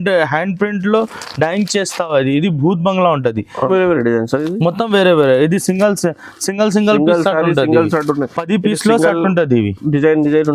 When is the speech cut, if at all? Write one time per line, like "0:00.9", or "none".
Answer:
0:03.7